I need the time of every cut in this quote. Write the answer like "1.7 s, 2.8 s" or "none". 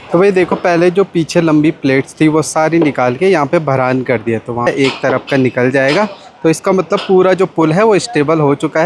4.7 s